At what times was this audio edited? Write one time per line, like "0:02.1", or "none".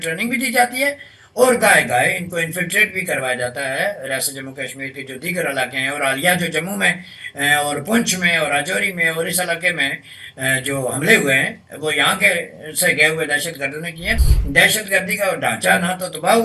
0:14.3